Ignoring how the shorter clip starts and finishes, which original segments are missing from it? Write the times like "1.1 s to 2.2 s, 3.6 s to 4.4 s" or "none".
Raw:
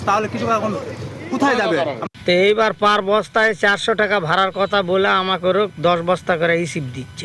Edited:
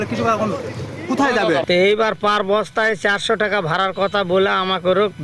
1.9 s to 2.2 s